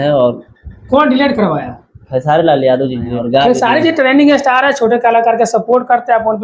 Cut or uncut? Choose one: cut